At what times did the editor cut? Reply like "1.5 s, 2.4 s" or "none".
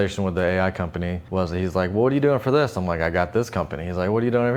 1.2 s